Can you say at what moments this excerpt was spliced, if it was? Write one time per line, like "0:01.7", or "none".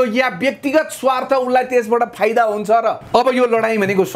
0:03.0